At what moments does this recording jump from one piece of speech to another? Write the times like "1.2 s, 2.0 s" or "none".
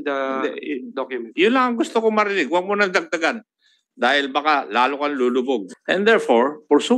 5.7 s